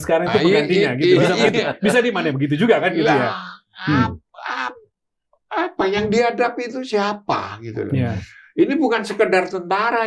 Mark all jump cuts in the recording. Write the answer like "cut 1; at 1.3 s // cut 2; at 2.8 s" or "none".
none